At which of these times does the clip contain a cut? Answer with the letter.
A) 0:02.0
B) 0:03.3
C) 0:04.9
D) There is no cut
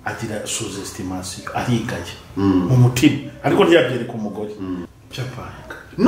C